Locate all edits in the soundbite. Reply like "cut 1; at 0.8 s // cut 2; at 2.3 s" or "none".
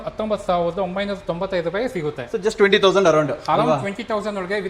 none